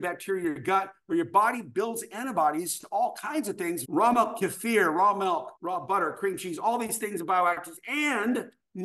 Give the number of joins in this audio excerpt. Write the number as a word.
two